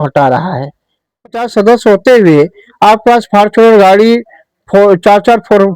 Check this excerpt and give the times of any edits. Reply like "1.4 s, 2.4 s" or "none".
1.2 s